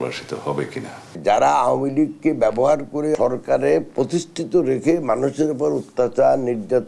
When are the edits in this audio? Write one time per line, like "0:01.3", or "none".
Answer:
0:01.0
0:03.2